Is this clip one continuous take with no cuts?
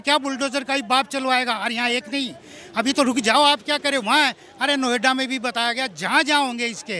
yes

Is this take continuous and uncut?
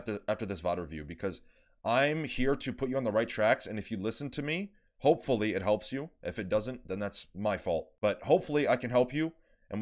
yes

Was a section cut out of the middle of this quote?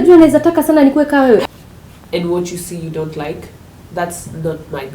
yes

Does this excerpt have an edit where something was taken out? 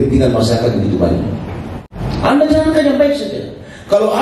yes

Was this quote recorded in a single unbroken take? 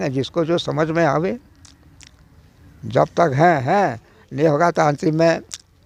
yes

